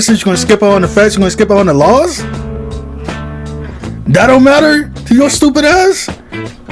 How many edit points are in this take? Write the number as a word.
zero